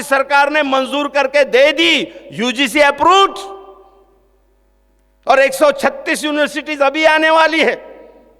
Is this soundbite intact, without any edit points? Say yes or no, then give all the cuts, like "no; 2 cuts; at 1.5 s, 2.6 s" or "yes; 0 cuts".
yes; 0 cuts